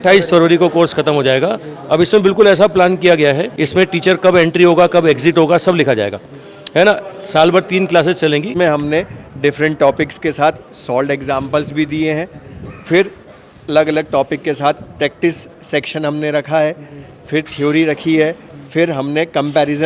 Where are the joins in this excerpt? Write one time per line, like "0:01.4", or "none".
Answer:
0:03.5
0:08.5